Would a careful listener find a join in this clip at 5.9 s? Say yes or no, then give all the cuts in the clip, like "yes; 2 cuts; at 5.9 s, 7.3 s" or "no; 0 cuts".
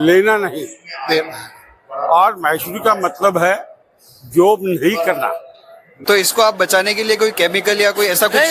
yes; 1 cut; at 5.9 s